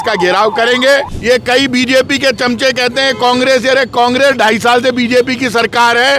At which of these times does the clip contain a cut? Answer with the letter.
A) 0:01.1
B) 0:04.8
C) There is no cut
A